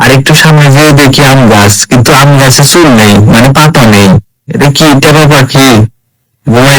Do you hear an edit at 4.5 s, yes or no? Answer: yes